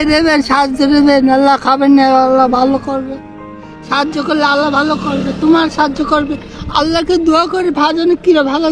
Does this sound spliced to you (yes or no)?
no